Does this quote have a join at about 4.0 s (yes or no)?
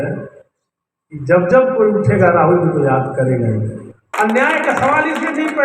yes